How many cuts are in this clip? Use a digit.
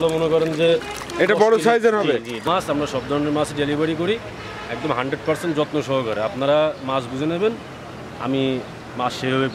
1